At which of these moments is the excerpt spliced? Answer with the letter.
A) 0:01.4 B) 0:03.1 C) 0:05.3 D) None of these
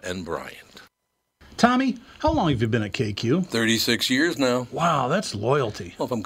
A